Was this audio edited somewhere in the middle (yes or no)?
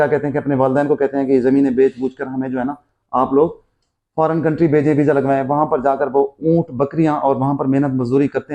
no